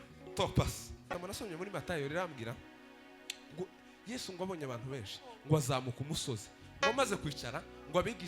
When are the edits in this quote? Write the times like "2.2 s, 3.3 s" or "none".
1.2 s